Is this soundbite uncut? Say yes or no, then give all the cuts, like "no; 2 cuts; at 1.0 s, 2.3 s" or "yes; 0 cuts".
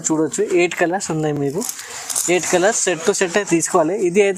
yes; 0 cuts